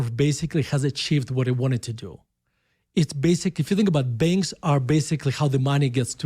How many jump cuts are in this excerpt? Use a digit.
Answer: 0